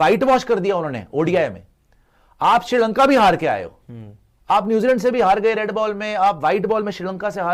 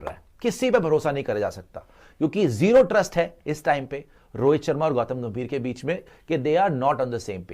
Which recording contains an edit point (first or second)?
second